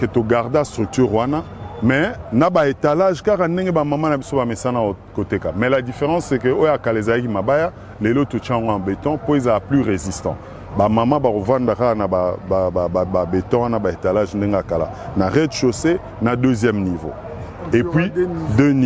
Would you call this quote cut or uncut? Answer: uncut